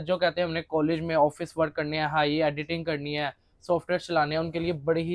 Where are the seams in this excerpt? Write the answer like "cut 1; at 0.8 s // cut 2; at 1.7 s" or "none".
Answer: none

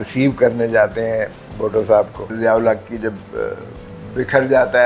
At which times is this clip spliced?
cut 1; at 2.3 s

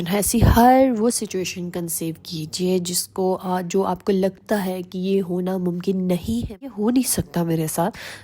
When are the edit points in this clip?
cut 1; at 6.7 s

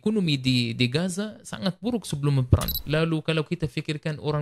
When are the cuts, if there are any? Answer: cut 1; at 2.7 s

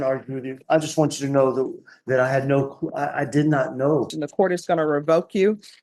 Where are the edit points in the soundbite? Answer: cut 1; at 4.1 s

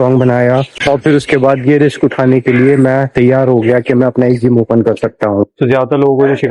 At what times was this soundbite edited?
cut 1; at 5.4 s

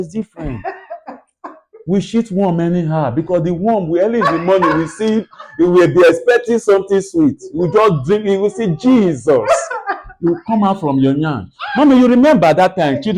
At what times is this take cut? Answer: none

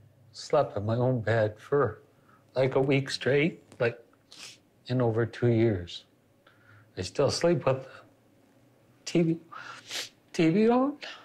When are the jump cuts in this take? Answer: none

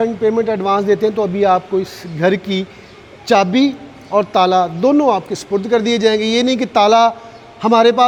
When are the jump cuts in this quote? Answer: none

